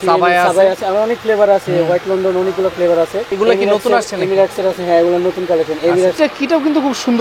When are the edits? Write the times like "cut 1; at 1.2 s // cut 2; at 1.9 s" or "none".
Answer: cut 1; at 3.3 s // cut 2; at 6.2 s